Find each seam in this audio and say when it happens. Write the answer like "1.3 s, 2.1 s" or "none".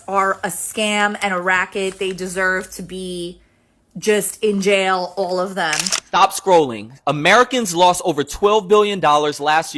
6.1 s